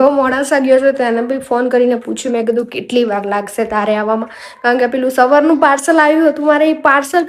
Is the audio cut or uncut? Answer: uncut